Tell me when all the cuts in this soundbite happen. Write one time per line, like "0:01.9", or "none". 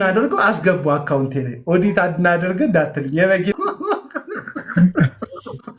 0:03.5